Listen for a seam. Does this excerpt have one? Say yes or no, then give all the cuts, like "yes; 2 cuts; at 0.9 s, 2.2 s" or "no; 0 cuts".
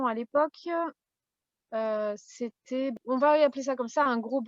yes; 1 cut; at 2.9 s